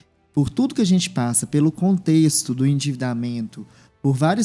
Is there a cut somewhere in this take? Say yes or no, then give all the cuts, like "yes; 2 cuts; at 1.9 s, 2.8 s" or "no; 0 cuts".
no; 0 cuts